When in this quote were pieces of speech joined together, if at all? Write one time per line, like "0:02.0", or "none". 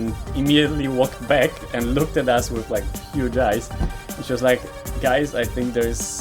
none